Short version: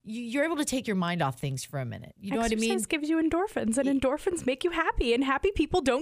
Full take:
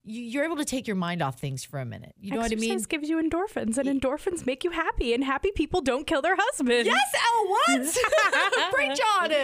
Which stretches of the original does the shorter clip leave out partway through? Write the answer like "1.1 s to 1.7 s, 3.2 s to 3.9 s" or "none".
none